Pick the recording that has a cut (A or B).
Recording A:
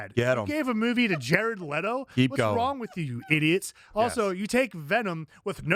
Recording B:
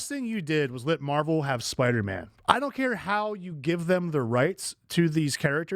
B